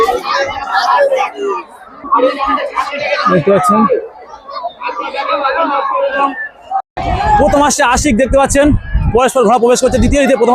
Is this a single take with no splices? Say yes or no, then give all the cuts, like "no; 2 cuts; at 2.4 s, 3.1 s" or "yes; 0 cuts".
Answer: no; 1 cut; at 6.9 s